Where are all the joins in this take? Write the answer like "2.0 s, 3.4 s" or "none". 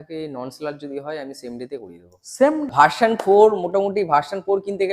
2.7 s